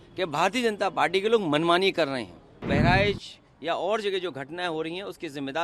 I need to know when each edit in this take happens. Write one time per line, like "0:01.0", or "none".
0:02.7